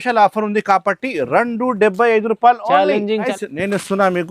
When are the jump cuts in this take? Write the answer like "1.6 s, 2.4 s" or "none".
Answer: 3.3 s